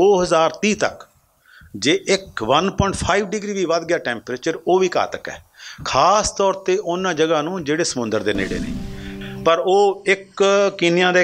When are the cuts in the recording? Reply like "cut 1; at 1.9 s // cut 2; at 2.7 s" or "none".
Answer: cut 1; at 9.1 s